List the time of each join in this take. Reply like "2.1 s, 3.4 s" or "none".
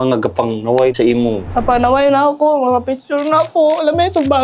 0.9 s